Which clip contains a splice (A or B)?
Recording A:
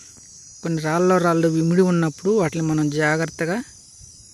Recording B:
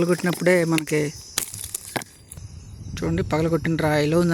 B